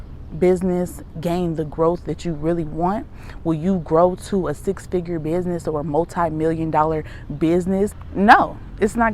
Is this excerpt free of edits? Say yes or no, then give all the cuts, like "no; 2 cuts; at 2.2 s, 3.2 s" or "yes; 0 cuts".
no; 1 cut; at 8.0 s